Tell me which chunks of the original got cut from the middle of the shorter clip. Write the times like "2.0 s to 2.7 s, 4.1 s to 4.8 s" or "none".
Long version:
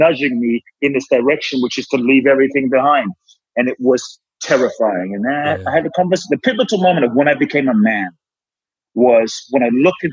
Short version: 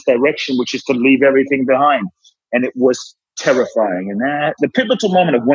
5.6 s to 6.2 s